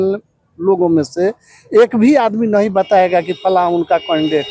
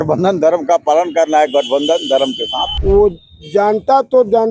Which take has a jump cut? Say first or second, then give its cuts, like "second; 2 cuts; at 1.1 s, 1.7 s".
second; 1 cut; at 2.7 s